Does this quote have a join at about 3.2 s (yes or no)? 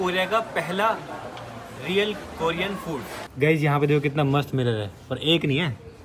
yes